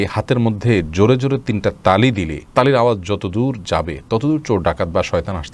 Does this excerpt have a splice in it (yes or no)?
no